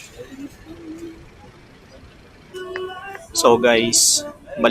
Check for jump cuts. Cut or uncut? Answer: cut